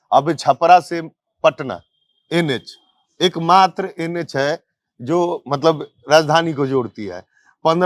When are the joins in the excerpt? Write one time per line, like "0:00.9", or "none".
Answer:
none